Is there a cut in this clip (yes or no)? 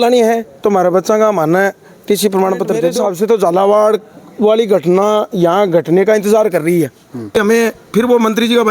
yes